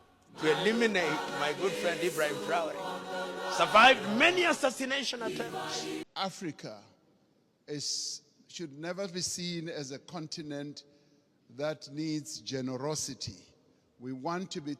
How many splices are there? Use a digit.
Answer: 1